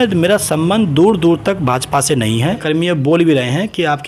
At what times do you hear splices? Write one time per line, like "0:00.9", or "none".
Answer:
0:02.6